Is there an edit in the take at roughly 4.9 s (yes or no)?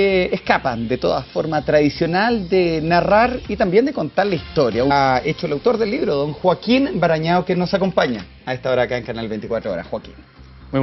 no